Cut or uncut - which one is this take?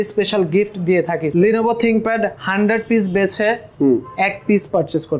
cut